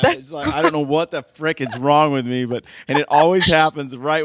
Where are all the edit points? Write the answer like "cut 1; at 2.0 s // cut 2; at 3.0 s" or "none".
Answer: none